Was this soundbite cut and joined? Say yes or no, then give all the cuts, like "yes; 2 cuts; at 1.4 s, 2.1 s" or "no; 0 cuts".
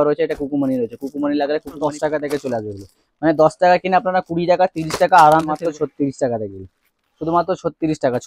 yes; 2 cuts; at 1.7 s, 5.6 s